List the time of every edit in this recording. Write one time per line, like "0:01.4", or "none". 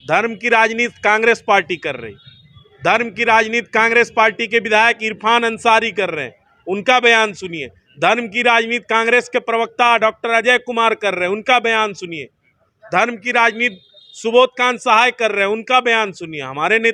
none

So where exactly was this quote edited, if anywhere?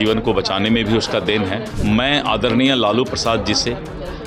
0:01.7

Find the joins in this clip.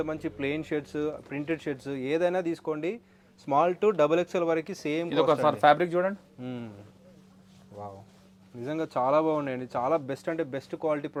none

